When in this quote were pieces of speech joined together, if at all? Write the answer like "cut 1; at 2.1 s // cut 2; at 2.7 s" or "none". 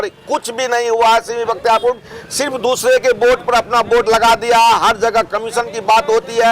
none